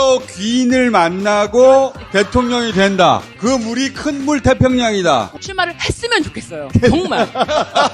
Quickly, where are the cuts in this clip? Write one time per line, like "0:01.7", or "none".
0:05.3